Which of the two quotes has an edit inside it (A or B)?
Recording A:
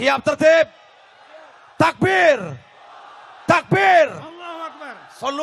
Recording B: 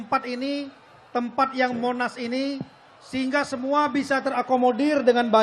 B